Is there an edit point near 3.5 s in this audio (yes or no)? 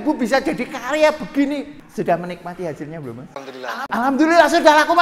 no